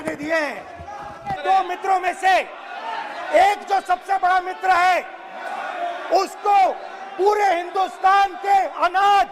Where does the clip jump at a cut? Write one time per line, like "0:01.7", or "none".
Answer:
0:01.4